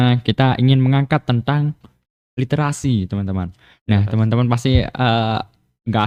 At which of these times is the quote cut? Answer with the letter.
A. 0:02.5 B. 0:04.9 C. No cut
C